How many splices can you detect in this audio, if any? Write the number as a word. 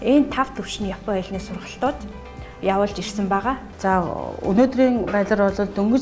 one